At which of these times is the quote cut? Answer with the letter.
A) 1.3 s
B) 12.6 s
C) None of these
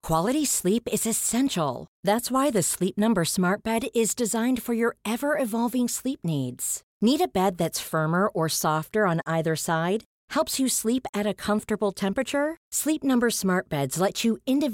C